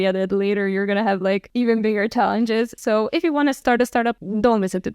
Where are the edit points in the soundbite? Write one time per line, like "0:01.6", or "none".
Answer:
0:03.6